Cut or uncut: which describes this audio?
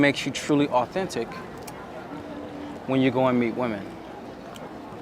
uncut